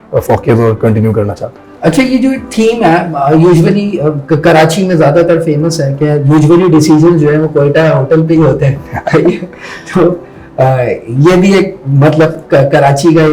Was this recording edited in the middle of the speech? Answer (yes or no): no